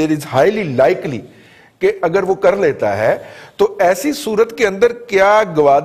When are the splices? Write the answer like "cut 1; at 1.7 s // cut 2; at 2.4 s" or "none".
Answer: none

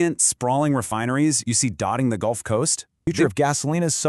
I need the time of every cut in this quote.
cut 1; at 3.1 s

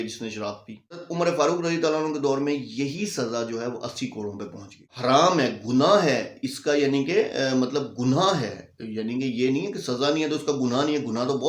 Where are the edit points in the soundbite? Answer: cut 1; at 1.1 s // cut 2; at 4.9 s

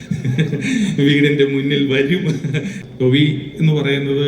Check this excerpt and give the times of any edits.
cut 1; at 2.8 s

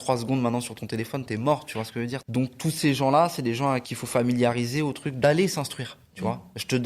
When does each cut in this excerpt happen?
cut 1; at 2.3 s // cut 2; at 3.9 s // cut 3; at 5.2 s

